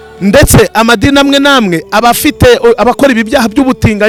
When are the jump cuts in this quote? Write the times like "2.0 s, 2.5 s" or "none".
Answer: none